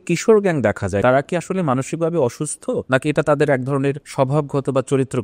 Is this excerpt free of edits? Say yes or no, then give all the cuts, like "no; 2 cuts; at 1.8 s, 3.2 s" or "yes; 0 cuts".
no; 3 cuts; at 1.0 s, 2.8 s, 4.0 s